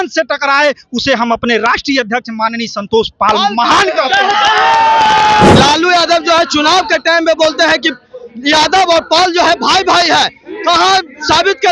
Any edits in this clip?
yes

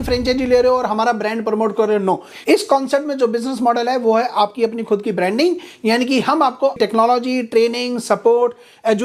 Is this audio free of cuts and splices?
no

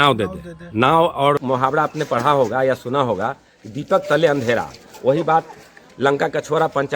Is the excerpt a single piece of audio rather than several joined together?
no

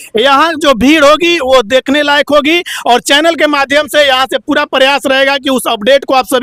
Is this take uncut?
yes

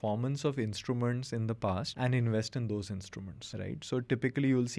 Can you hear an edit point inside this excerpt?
yes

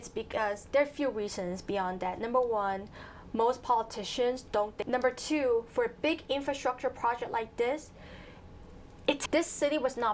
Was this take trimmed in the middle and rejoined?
yes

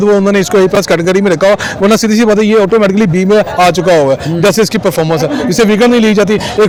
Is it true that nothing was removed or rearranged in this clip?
yes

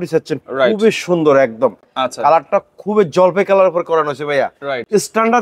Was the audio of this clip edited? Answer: no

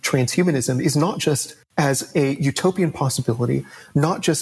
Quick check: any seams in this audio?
no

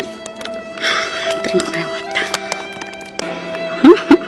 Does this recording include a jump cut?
yes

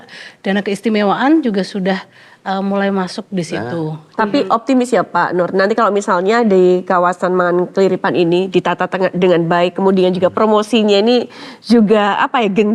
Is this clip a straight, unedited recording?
no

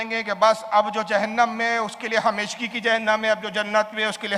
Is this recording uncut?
yes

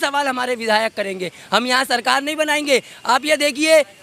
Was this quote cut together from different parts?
no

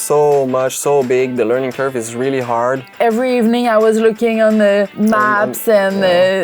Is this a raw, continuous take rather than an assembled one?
no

